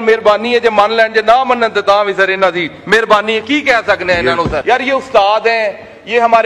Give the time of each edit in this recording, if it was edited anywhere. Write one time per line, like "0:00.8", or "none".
0:04.6